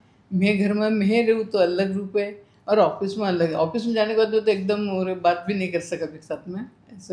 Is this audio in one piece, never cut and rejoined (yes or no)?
yes